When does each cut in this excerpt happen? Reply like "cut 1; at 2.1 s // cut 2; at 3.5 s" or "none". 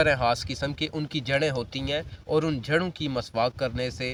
none